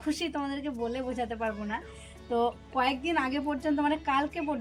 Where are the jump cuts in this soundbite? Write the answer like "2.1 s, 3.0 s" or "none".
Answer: none